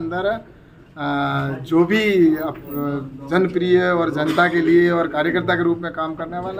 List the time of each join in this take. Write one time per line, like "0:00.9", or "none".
none